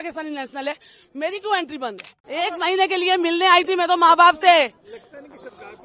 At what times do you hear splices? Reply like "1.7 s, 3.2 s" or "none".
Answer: 2.1 s